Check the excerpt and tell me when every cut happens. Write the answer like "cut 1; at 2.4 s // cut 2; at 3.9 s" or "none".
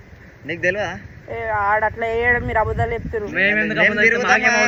none